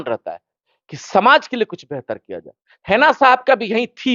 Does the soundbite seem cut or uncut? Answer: uncut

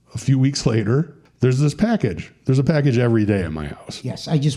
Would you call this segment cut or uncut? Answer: cut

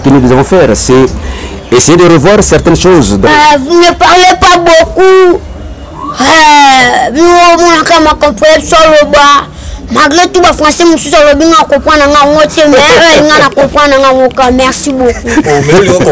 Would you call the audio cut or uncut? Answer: cut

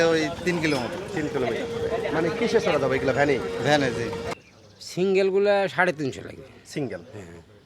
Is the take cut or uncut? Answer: cut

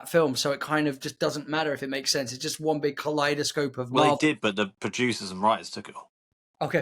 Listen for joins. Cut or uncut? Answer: uncut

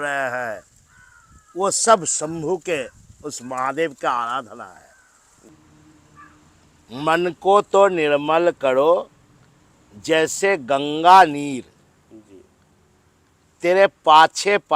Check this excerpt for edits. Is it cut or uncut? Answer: cut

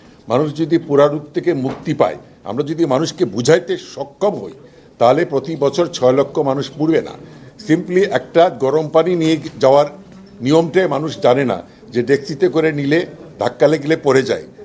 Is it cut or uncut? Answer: uncut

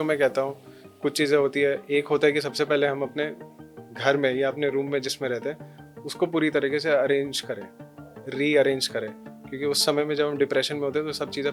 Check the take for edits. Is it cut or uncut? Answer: uncut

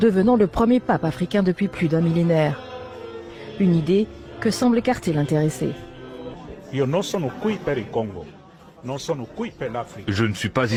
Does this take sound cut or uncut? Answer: uncut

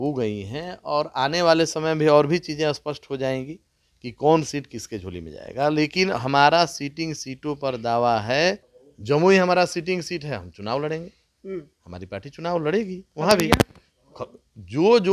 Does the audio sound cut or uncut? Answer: cut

